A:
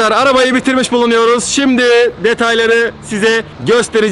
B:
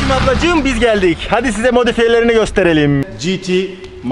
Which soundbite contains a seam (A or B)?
B